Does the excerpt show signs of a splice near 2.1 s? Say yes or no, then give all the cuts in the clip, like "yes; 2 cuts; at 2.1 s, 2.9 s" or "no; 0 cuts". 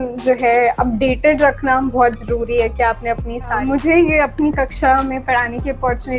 no; 1 cut; at 3.6 s